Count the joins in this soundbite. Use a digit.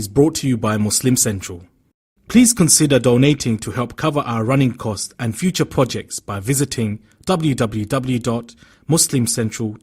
0